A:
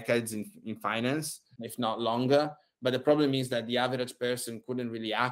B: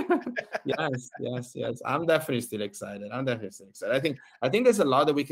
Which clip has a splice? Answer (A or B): A